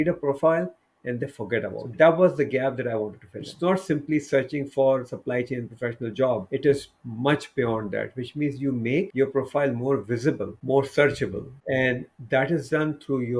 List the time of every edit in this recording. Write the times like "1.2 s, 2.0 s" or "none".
1.8 s, 3.5 s, 6.4 s, 9.1 s, 10.5 s, 11.5 s

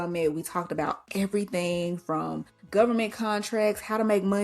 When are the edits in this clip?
2.5 s

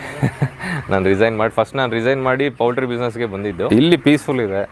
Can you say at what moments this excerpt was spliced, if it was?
3.7 s

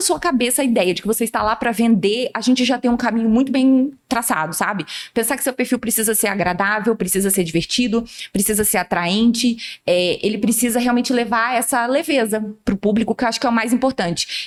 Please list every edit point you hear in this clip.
none

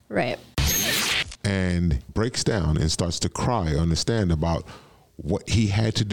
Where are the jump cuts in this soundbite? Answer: 0.9 s, 2.0 s

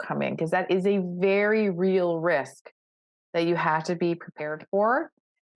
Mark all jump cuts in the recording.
none

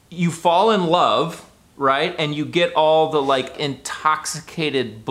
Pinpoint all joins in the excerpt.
3.5 s

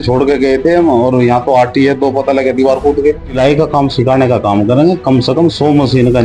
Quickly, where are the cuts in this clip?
3.4 s

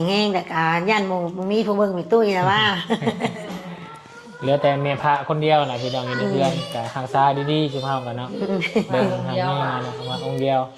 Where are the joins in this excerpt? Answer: none

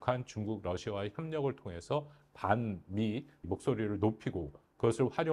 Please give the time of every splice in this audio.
3.5 s

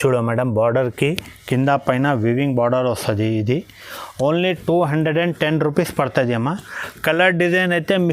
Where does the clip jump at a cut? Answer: none

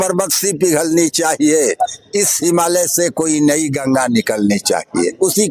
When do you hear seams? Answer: none

